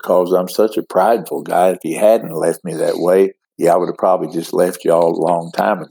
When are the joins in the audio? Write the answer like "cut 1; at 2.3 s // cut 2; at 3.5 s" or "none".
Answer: cut 1; at 3.4 s